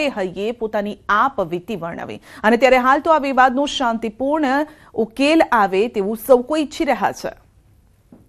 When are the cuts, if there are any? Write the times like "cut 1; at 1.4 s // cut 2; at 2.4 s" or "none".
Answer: cut 1; at 3.9 s